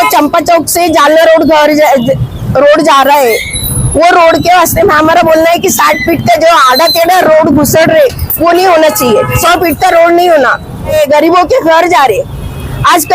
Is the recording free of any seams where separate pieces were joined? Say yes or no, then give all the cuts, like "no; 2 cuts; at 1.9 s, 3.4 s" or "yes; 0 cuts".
no; 2 cuts; at 9.4 s, 10.9 s